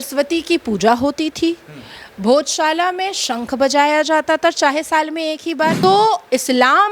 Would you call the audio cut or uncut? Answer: cut